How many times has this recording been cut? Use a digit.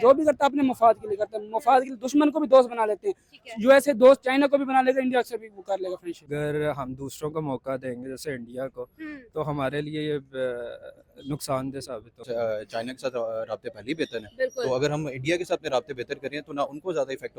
2